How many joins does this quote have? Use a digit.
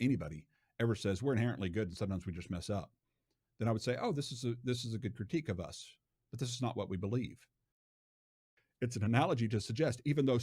1